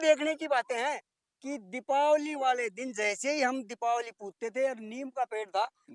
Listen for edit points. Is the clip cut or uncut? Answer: uncut